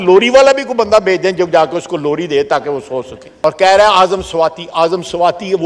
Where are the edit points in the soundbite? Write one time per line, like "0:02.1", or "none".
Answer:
0:03.2